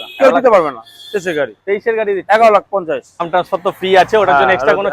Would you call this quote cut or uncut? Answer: cut